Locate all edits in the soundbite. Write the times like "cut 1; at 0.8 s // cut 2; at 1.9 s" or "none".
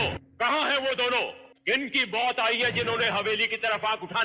none